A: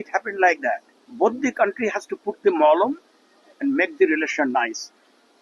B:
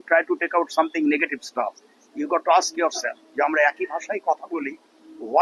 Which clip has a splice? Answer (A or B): A